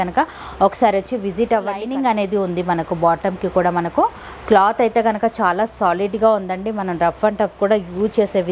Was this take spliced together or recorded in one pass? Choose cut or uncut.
cut